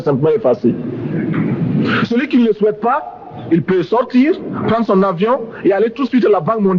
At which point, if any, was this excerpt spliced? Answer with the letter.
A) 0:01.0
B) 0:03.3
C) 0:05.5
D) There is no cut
D